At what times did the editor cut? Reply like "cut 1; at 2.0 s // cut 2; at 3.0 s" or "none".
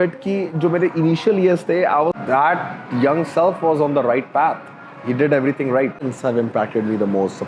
cut 1; at 2.2 s // cut 2; at 6.0 s